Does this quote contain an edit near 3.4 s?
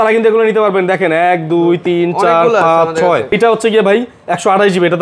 yes; 1 cut; at 3.4 s

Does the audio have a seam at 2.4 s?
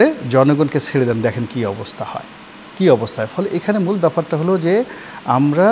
no; 0 cuts

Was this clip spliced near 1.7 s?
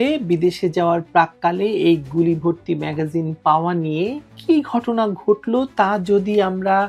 no; 0 cuts

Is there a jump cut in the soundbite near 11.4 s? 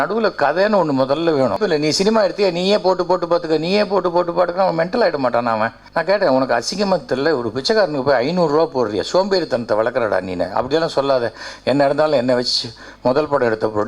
no; 2 cuts; at 1.6 s, 5.8 s

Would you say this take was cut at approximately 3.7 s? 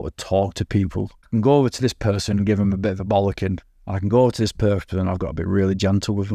no; 1 cut; at 1.2 s

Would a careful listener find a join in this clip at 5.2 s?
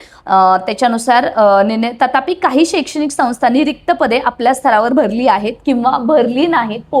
no; 0 cuts

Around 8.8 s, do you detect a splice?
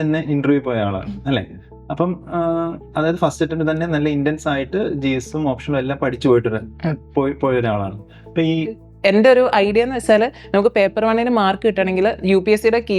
yes; 1 cut; at 8.8 s

